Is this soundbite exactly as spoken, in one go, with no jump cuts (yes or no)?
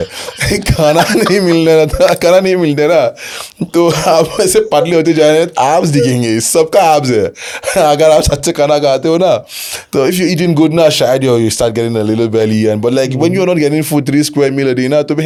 yes